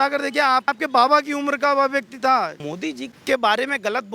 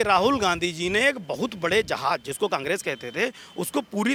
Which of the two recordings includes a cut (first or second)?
first